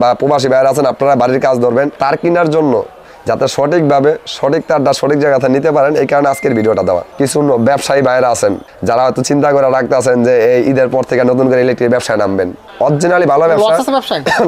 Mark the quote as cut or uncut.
cut